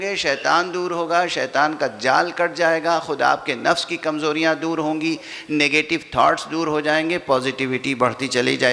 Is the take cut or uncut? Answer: uncut